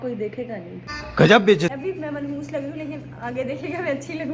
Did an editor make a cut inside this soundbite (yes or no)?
yes